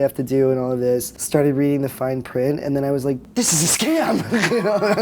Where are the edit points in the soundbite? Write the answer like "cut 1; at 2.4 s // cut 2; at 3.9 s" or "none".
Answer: cut 1; at 1.1 s // cut 2; at 3.2 s